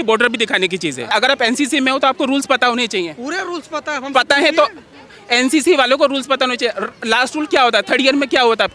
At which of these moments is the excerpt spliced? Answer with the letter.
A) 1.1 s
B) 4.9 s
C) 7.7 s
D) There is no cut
A